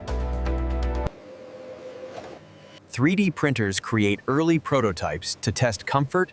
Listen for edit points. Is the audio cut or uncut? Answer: uncut